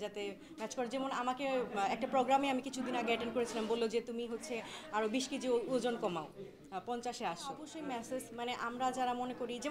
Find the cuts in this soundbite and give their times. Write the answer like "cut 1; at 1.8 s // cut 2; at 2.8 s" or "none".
cut 1; at 7.7 s